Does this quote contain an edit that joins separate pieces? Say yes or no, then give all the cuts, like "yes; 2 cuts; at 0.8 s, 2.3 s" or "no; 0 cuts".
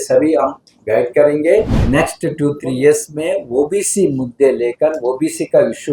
yes; 1 cut; at 1.8 s